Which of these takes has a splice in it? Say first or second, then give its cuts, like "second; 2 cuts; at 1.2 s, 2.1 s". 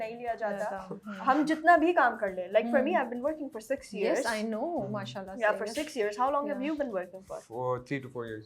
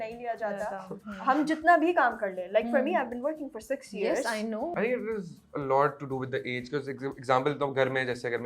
second; 1 cut; at 4.7 s